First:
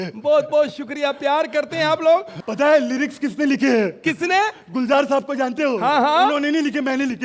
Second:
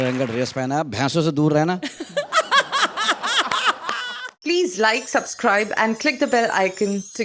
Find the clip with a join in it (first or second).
second